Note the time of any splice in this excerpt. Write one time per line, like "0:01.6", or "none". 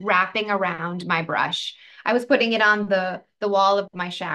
none